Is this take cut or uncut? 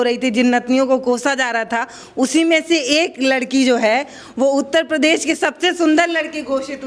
uncut